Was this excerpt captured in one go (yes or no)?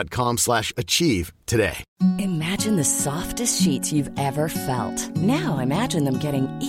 no